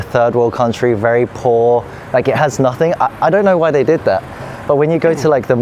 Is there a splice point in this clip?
no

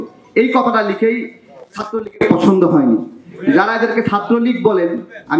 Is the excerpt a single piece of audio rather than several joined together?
yes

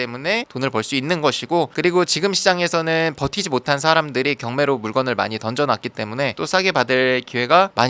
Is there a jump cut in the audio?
no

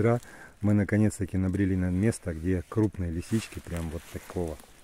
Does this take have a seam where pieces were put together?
no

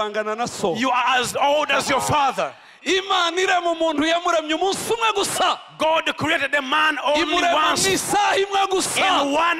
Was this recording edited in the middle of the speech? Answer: no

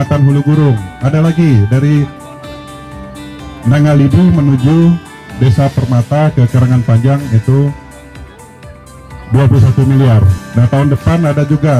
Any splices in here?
yes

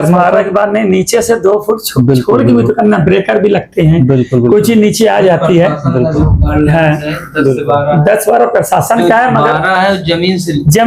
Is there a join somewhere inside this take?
no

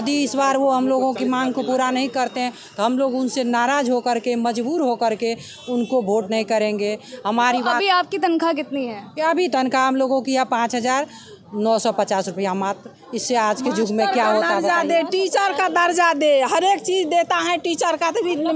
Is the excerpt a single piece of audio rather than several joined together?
yes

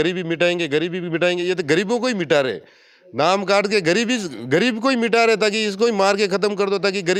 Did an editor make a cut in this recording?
no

